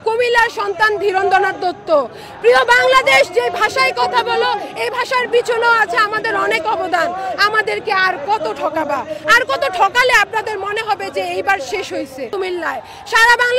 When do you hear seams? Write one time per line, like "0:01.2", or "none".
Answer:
0:12.3